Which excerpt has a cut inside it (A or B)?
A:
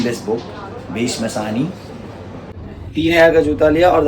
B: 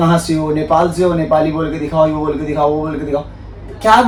A